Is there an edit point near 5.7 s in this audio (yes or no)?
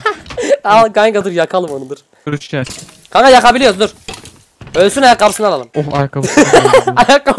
yes